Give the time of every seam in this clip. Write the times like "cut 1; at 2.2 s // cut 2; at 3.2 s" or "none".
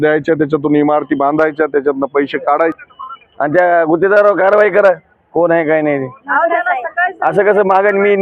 cut 1; at 2.8 s

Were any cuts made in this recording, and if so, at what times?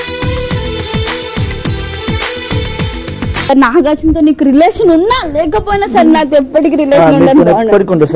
cut 1; at 3.5 s

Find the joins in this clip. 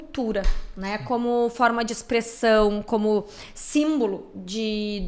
none

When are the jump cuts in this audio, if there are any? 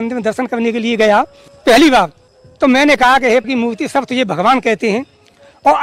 cut 1; at 1.4 s

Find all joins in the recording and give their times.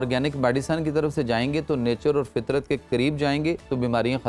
none

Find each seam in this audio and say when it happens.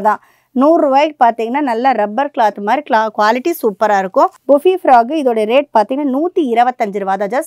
cut 1; at 4.3 s

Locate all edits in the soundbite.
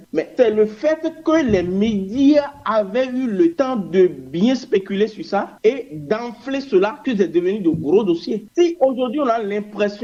none

